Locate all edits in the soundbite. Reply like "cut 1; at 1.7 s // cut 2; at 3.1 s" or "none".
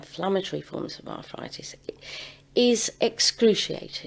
none